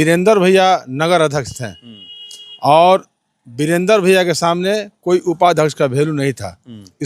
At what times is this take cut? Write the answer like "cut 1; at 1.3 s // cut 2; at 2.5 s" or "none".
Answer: none